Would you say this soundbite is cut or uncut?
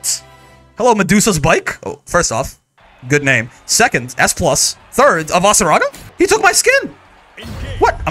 cut